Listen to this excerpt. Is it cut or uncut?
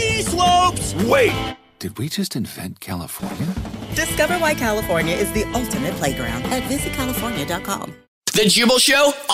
cut